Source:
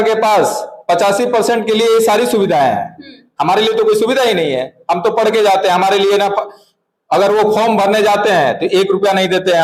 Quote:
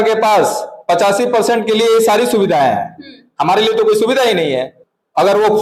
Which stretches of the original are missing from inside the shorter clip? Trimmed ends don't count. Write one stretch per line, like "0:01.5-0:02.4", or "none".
0:04.7-0:06.7